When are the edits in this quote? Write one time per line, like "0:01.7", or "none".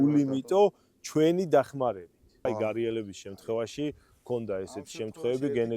0:02.5